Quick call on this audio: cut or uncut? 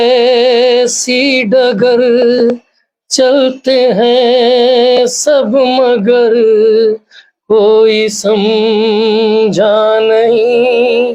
uncut